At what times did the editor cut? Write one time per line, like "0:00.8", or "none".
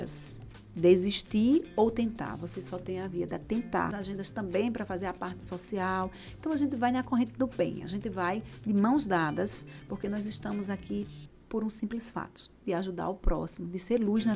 0:03.9